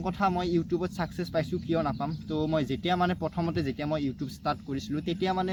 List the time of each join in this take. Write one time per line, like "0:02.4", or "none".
none